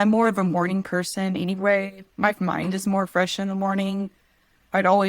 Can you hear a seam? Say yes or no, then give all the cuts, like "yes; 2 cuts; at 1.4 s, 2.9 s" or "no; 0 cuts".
no; 0 cuts